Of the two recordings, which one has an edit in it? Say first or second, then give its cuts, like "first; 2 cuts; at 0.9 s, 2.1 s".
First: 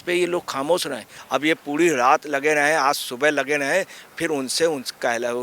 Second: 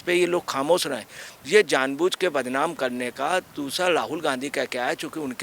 first; 1 cut; at 1.1 s